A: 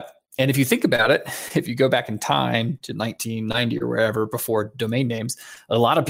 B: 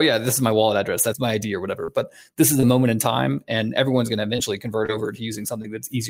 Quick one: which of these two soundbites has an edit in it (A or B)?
B